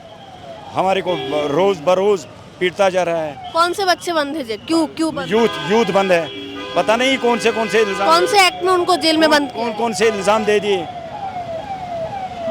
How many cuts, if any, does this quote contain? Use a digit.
0